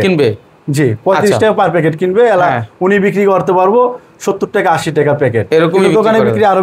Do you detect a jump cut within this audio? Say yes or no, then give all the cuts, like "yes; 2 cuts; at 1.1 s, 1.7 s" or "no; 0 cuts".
no; 0 cuts